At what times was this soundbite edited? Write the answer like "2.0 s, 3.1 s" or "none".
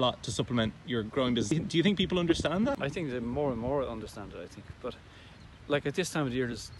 1.5 s, 2.8 s